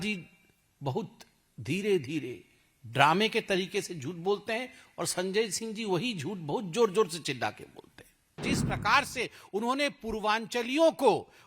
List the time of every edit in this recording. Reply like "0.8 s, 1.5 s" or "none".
8.5 s